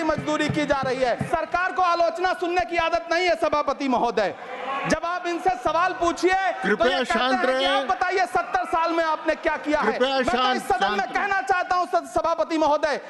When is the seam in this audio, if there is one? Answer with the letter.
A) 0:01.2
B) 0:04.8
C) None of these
A